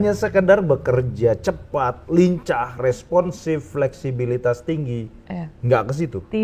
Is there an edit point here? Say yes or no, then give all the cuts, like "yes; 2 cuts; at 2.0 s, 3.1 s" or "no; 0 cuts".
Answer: no; 0 cuts